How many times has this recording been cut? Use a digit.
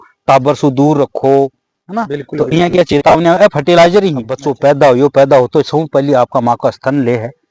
1